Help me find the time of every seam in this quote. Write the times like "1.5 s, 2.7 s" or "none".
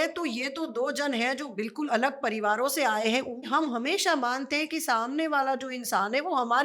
1.9 s, 3.5 s